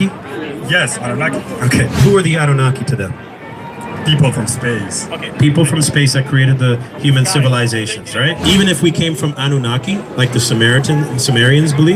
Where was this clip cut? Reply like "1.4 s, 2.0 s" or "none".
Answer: 2.0 s, 8.4 s